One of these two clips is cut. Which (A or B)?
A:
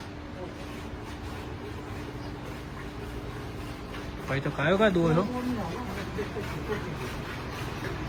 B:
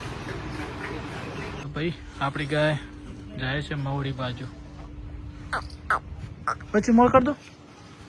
B